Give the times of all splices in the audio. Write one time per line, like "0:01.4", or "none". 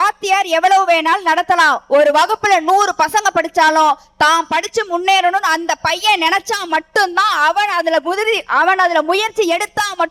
none